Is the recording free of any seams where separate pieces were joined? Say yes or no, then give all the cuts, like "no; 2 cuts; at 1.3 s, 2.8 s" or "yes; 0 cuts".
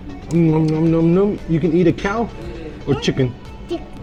yes; 0 cuts